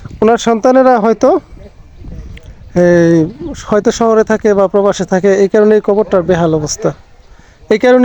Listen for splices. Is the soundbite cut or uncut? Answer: uncut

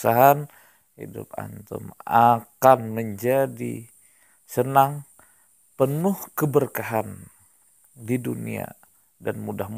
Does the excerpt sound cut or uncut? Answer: uncut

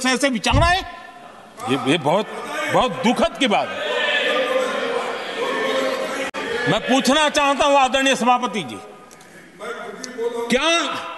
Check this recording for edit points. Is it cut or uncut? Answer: uncut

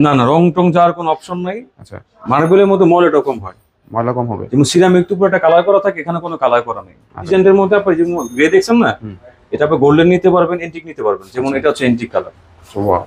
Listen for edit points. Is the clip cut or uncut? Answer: cut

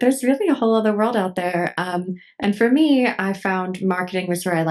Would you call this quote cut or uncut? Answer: uncut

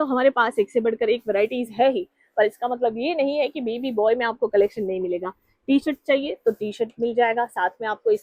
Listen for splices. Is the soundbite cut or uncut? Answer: uncut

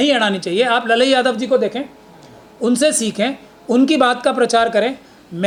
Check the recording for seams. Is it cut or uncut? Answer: uncut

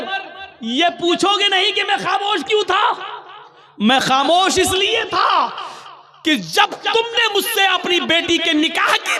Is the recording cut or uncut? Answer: uncut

